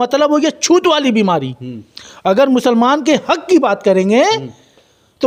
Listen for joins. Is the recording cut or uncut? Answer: uncut